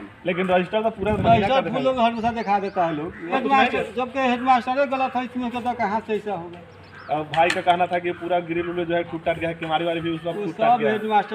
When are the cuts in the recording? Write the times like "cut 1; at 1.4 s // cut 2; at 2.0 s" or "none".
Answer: cut 1; at 3.4 s

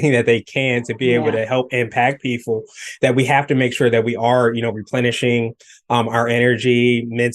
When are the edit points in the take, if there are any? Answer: none

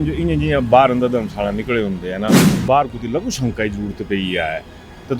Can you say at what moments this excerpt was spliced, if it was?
none

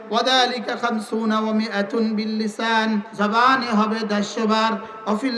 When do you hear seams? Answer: cut 1; at 3.1 s

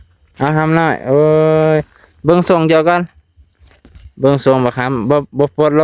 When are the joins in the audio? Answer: none

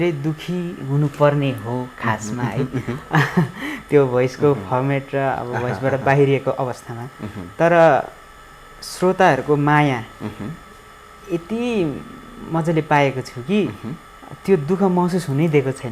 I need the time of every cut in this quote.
none

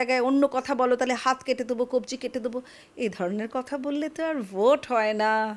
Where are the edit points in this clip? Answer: none

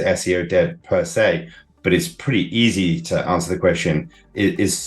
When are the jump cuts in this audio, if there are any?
cut 1; at 1.7 s

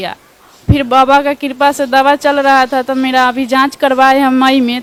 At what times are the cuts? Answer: none

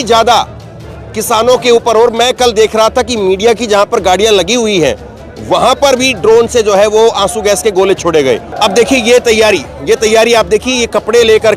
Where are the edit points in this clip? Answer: cut 1; at 8.5 s

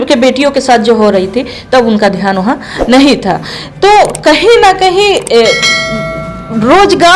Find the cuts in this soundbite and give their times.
none

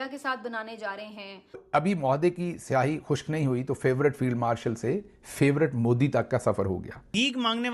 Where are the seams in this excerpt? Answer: cut 1; at 1.5 s

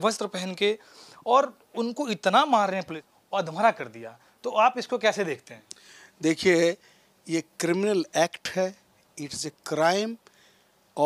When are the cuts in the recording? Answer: cut 1; at 2.9 s

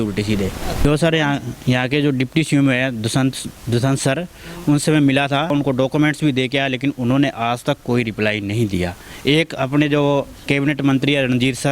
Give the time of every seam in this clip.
cut 1; at 0.8 s // cut 2; at 5.5 s

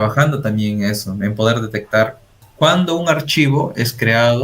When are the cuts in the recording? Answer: cut 1; at 2.4 s

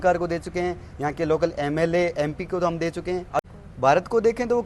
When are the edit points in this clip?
cut 1; at 3.4 s

